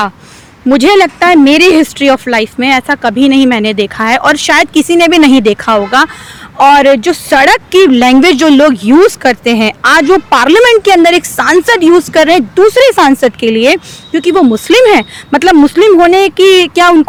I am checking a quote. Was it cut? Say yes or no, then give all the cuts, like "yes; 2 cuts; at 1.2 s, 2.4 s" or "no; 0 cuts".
no; 0 cuts